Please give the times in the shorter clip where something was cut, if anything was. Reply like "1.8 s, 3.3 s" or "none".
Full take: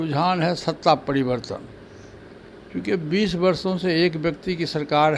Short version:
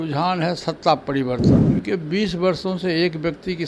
1.6 s